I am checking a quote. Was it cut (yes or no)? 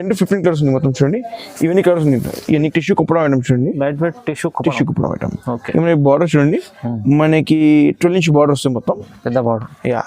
yes